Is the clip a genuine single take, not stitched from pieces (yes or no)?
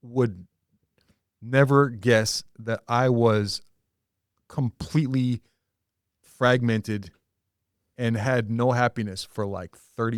yes